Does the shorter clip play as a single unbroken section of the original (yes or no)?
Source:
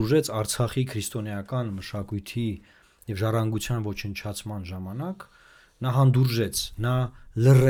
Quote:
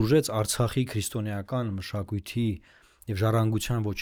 yes